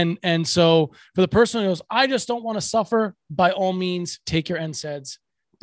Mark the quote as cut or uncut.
uncut